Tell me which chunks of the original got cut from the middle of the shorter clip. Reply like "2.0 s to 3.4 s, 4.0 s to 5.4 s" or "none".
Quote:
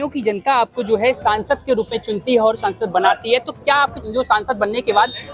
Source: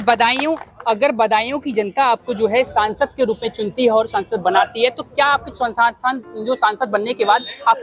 5.5 s to 6.3 s